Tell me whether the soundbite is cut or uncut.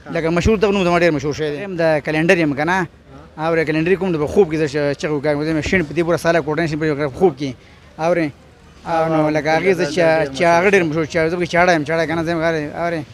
cut